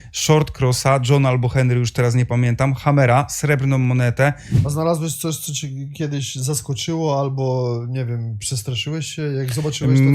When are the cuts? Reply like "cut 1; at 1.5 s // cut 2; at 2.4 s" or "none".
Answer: cut 1; at 4.5 s